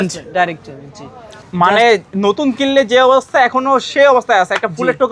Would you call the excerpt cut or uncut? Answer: cut